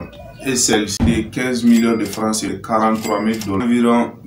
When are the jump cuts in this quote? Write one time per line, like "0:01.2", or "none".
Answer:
0:01.0
0:02.6